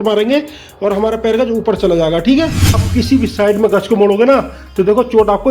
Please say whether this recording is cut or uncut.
cut